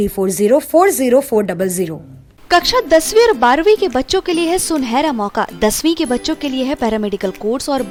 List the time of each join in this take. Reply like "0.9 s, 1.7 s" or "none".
none